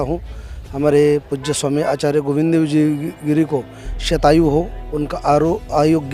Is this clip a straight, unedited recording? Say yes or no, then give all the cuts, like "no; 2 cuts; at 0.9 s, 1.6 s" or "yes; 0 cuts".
yes; 0 cuts